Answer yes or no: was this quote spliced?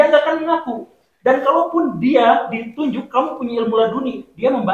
no